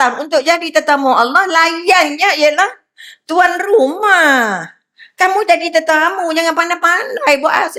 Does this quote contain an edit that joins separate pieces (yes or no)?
no